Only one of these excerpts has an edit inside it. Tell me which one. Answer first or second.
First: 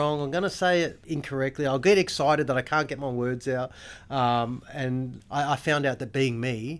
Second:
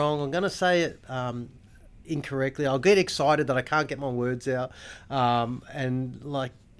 first